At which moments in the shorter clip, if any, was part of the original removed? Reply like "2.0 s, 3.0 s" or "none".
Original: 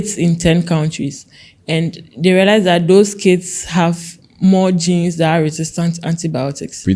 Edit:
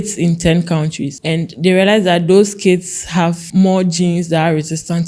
1.4 s, 3.4 s